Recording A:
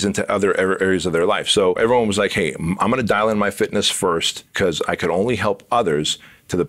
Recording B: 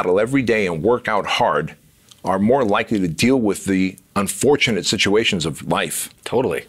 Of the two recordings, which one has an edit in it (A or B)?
A